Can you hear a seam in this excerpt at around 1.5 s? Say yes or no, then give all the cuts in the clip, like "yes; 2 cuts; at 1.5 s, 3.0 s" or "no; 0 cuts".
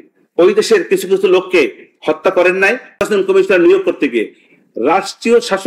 no; 1 cut; at 3.0 s